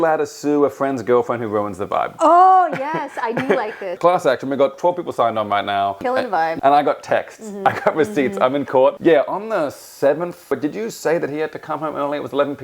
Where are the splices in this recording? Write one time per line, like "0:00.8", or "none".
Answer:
0:03.9
0:06.4
0:09.0
0:10.5